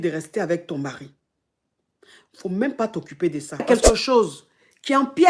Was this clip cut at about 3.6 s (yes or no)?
yes